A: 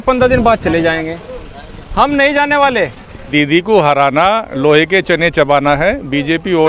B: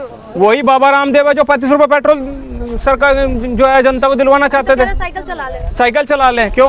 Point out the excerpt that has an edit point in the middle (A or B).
A